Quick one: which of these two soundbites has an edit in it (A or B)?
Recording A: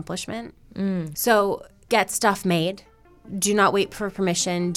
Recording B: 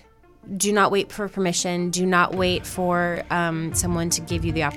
A